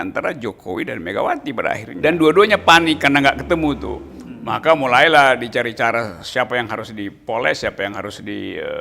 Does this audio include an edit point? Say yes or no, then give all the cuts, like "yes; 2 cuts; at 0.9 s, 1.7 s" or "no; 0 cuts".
yes; 1 cut; at 1.9 s